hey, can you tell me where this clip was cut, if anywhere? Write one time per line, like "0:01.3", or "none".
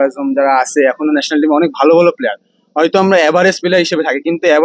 none